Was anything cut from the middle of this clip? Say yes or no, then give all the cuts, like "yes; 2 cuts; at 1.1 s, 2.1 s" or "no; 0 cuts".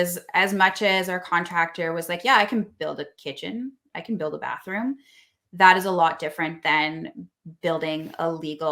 no; 0 cuts